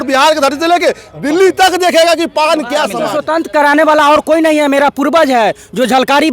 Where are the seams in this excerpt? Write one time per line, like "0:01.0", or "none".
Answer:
0:03.1